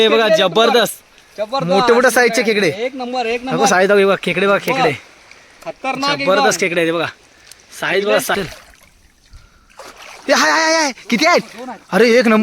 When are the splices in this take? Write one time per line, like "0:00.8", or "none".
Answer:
0:08.3